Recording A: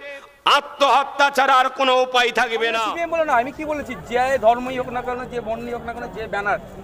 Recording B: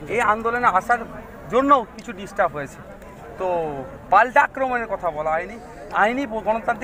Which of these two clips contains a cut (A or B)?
A